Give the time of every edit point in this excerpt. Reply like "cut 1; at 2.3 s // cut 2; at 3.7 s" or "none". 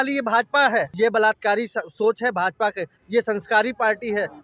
cut 1; at 0.9 s